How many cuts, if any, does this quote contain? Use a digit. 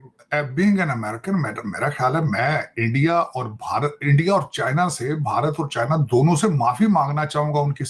0